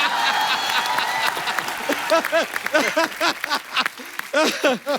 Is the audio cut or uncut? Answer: uncut